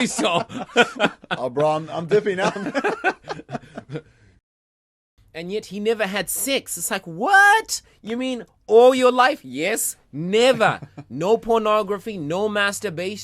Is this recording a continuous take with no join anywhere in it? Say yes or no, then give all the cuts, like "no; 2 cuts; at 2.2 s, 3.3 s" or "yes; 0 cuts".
no; 1 cut; at 4.7 s